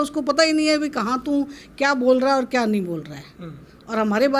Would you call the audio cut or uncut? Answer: uncut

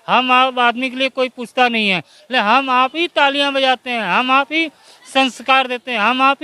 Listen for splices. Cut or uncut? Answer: uncut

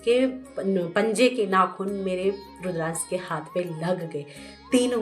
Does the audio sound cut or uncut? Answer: uncut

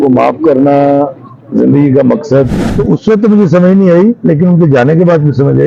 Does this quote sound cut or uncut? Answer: cut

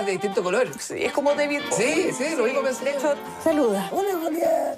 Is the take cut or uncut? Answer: cut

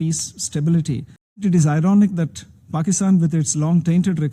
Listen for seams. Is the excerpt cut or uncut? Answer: cut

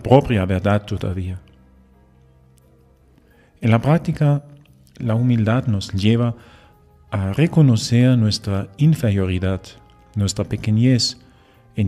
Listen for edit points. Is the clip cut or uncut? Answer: uncut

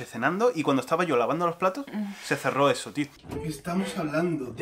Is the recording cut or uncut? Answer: cut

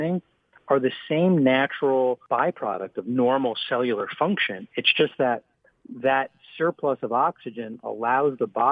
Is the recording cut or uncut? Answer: cut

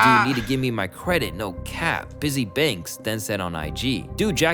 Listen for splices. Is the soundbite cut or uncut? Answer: uncut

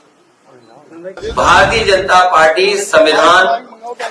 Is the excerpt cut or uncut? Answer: cut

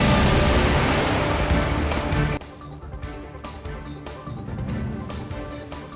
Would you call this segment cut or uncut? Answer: uncut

